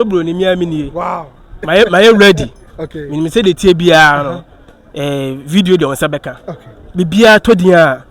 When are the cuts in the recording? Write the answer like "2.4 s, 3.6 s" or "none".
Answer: 1.7 s